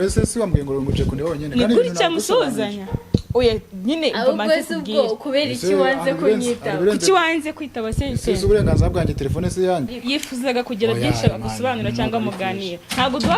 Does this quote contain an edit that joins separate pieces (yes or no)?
yes